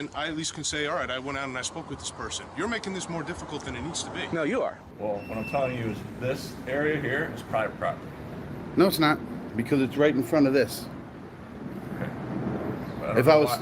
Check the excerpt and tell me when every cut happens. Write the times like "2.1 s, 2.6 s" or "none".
4.8 s